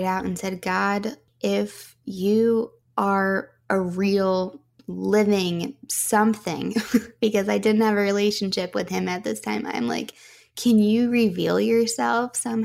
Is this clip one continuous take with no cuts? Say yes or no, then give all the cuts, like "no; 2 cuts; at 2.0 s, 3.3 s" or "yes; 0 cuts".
no; 2 cuts; at 1.3 s, 3.2 s